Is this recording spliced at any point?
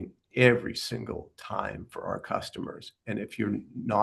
no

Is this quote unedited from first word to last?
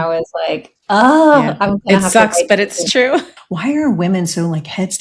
no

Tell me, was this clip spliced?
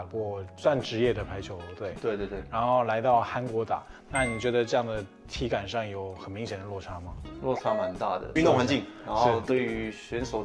yes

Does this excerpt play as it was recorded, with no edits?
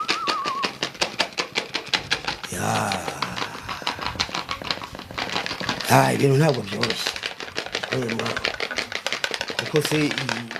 yes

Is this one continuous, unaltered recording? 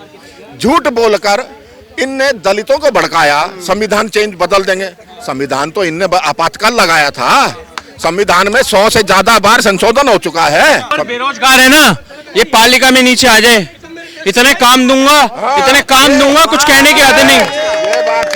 no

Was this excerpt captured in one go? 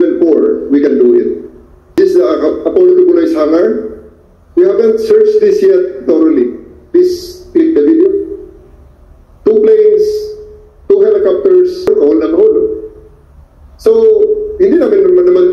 no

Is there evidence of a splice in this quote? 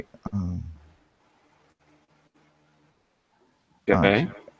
no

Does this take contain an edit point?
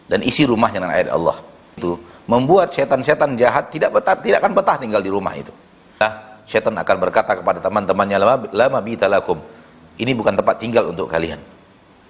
yes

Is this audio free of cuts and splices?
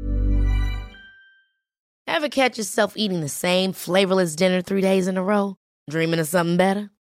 no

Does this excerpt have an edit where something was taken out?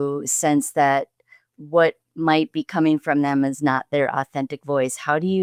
no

